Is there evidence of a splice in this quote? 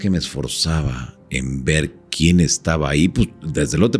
no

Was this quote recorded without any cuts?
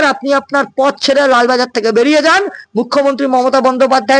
yes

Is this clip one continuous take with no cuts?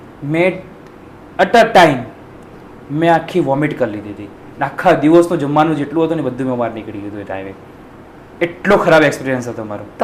yes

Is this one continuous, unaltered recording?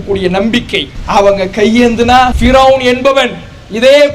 no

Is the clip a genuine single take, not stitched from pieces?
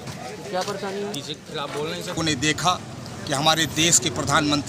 no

